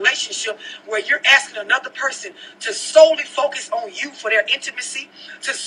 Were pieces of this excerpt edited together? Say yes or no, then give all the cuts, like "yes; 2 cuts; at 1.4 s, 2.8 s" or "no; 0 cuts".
yes; 1 cut; at 1.2 s